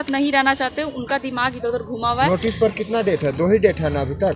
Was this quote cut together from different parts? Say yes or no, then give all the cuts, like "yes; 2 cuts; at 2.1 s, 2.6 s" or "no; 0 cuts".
no; 0 cuts